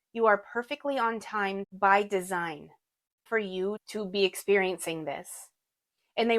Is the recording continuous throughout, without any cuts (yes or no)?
no